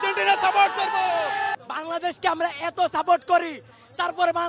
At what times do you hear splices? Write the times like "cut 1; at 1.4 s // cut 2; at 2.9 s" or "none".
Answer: cut 1; at 1.5 s